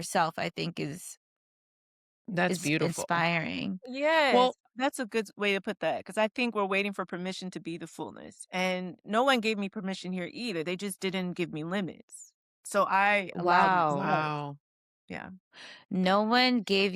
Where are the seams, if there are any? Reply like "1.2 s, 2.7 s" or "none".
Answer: none